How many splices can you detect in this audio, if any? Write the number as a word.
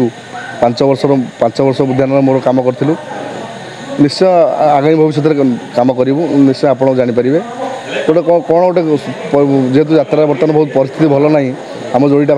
zero